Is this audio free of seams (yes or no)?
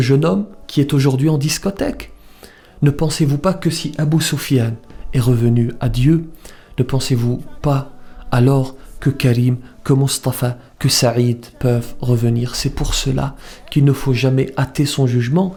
yes